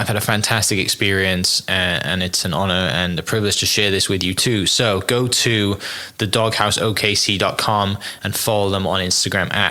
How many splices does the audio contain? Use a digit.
0